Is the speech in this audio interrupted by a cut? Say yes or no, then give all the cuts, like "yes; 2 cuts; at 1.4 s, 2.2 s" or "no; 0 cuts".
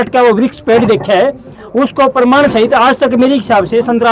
no; 0 cuts